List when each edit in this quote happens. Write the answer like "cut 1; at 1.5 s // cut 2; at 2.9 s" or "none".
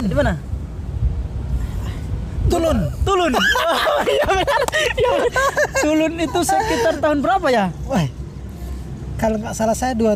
none